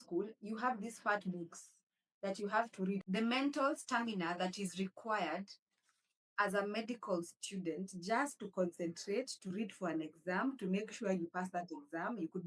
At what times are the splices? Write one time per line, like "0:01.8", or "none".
0:03.0